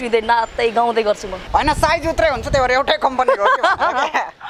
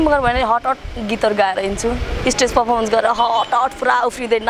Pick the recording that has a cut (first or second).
first